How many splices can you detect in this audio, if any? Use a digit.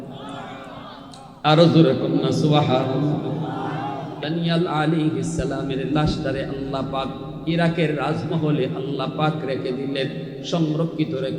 1